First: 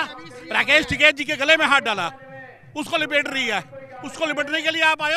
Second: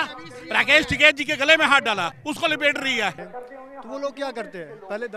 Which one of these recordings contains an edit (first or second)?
second